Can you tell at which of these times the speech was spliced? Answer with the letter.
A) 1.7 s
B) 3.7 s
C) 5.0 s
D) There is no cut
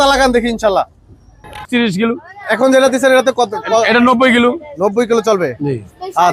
A